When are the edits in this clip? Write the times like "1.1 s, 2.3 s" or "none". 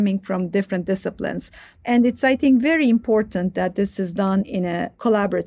1.6 s, 4.5 s